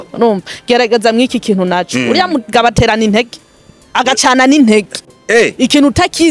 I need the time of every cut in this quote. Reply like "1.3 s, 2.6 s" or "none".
none